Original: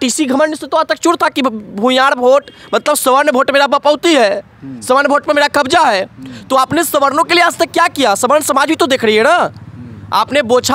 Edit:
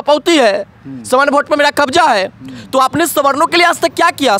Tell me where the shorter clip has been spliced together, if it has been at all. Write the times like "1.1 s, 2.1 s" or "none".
none